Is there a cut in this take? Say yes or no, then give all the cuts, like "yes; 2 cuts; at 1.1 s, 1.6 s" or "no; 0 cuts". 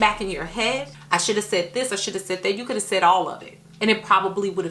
yes; 1 cut; at 0.9 s